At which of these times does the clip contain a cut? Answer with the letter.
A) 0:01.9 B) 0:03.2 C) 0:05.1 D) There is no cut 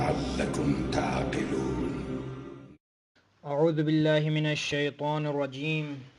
C